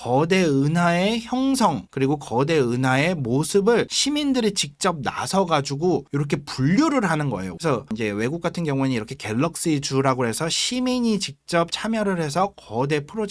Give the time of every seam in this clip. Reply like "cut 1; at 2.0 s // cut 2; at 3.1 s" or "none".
cut 1; at 7.5 s